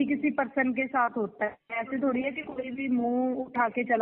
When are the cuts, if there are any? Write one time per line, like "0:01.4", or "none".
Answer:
none